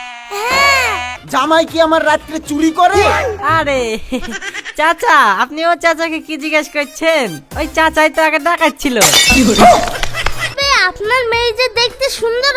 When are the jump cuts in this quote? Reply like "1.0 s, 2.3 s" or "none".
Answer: 1.2 s, 10.6 s